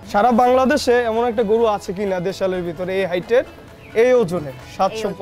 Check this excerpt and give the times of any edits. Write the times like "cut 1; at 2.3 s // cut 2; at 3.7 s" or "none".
none